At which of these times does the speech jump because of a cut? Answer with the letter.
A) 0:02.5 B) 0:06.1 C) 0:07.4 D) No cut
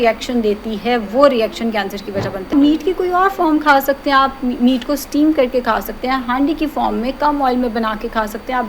A